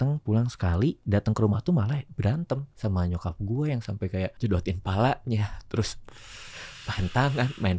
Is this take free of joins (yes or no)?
no